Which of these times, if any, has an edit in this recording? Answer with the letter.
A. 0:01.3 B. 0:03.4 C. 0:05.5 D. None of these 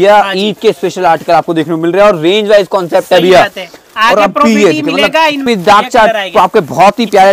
C